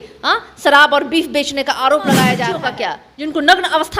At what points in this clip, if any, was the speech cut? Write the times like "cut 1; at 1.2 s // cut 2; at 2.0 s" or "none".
cut 1; at 2.5 s